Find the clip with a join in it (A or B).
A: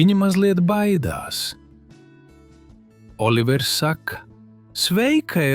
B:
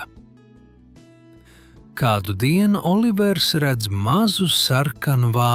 A